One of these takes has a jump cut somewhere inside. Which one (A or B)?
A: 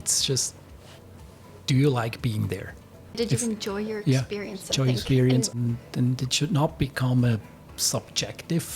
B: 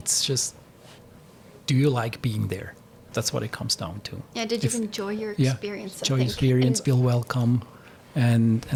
A